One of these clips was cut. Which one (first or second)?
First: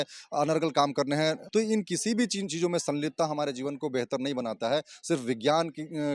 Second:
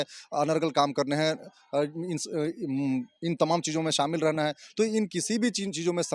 first